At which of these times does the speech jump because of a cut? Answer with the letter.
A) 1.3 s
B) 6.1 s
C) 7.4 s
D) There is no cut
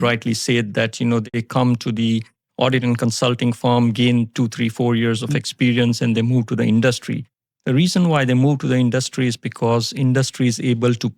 A